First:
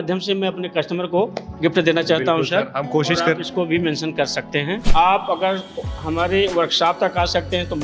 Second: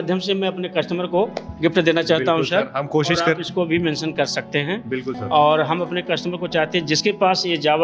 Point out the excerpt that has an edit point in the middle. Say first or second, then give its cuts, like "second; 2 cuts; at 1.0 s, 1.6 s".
first; 1 cut; at 4.8 s